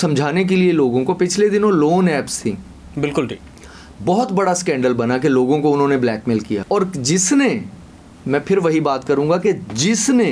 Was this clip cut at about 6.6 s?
yes; 1 cut; at 6.6 s

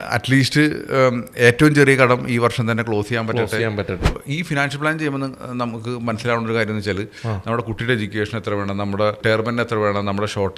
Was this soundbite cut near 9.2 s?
yes; 2 cuts; at 4.1 s, 9.2 s

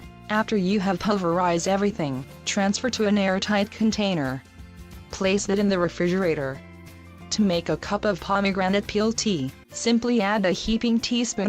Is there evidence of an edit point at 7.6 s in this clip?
yes; 1 cut; at 7.6 s

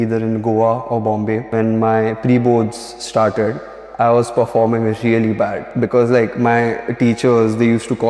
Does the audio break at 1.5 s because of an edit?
yes; 2 cuts; at 1.5 s, 5.6 s

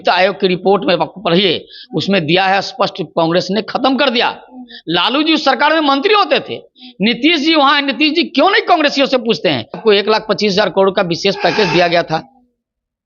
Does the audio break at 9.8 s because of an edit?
yes; 1 cut; at 9.8 s

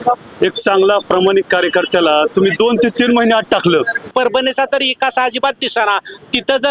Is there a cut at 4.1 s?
yes; 1 cut; at 4.1 s

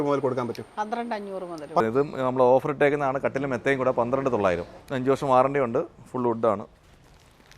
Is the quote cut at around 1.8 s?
yes; 2 cuts; at 1.8 s, 4.8 s

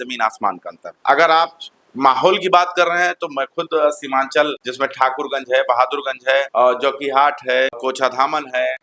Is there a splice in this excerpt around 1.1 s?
no; 0 cuts

